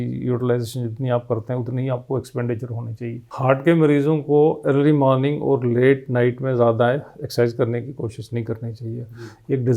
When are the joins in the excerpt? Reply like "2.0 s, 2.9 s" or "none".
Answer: 3.2 s